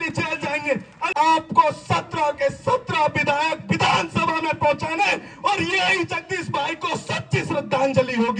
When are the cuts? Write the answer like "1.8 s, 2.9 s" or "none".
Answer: 1.0 s